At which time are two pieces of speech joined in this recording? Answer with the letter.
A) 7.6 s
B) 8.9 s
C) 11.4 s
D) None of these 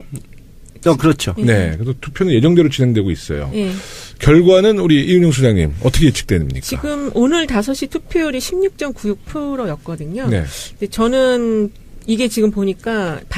A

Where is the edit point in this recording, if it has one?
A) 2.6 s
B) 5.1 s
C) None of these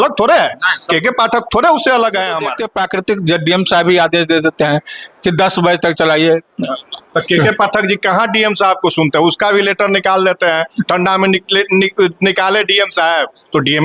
A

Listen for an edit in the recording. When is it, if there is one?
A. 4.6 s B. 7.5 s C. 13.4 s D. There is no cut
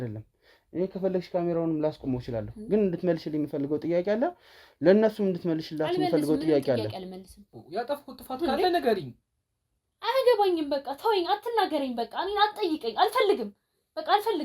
B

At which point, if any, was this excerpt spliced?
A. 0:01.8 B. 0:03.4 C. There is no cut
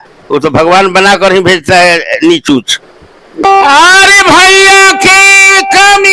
B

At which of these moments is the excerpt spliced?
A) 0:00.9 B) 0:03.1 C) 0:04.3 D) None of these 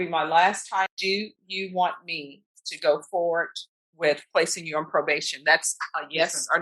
A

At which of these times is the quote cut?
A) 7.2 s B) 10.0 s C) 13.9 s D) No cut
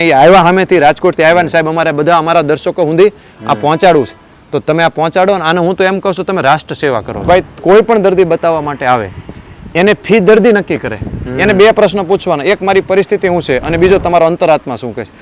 A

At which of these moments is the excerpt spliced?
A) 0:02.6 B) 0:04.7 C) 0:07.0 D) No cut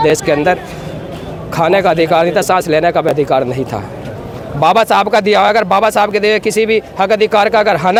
D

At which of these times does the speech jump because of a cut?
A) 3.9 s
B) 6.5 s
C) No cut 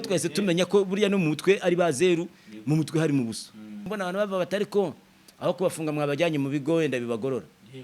A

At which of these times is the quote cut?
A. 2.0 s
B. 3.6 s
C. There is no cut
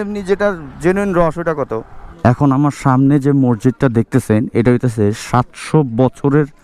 A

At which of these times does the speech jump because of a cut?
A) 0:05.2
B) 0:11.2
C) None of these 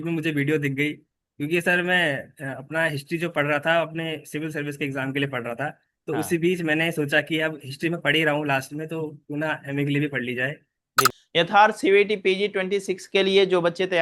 B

